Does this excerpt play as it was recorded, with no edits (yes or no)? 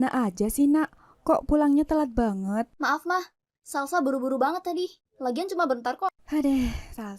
no